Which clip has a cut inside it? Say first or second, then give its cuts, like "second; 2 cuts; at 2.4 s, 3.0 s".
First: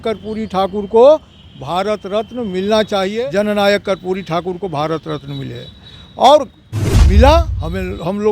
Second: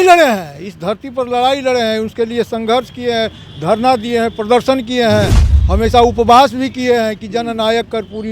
first; 1 cut; at 3.1 s